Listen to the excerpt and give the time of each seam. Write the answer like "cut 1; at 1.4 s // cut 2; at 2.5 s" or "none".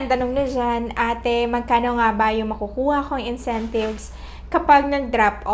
none